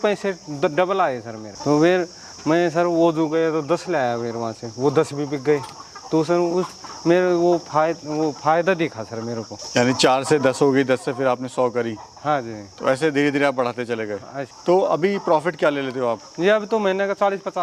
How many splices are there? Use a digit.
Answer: 0